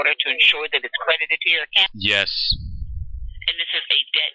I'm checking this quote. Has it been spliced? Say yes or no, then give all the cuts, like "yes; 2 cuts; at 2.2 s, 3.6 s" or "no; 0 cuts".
yes; 1 cut; at 1.9 s